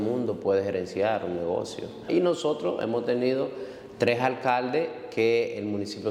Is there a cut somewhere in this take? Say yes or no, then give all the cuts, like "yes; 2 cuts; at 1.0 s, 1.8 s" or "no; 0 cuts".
yes; 1 cut; at 2.1 s